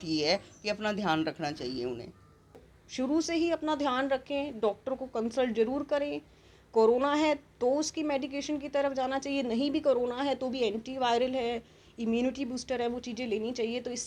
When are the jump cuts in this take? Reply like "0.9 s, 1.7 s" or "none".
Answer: 2.7 s